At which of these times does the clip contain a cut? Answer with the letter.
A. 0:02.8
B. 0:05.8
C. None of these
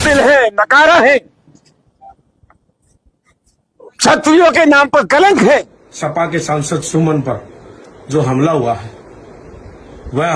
B